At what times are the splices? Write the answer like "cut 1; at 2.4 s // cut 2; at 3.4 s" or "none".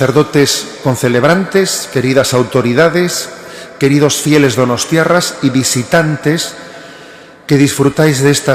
none